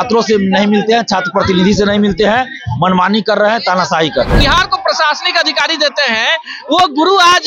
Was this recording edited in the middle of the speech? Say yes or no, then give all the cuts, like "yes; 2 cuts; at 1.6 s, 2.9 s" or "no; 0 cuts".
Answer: yes; 1 cut; at 4.4 s